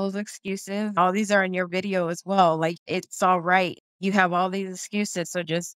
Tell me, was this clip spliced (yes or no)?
yes